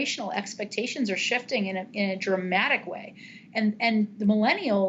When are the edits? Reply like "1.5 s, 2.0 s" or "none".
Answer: none